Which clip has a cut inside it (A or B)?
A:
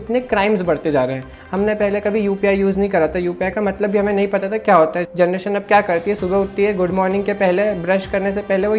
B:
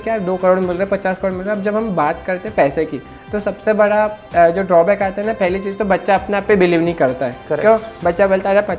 A